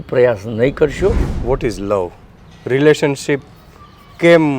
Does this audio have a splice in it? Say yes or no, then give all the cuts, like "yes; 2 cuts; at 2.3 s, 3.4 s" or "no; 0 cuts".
yes; 1 cut; at 1.3 s